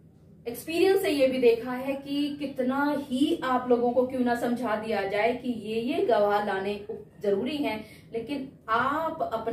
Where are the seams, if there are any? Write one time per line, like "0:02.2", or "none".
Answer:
none